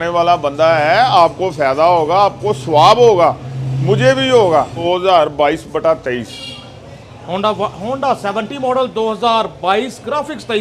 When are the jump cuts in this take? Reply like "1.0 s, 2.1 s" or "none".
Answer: none